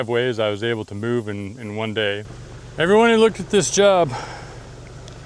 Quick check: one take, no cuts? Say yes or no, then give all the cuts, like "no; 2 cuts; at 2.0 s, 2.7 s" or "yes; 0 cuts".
no; 1 cut; at 2.3 s